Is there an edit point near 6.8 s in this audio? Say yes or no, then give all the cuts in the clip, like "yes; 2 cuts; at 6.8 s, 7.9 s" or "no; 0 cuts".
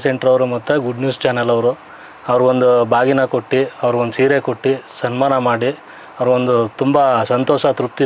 no; 0 cuts